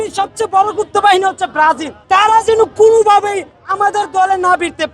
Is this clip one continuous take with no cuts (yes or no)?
no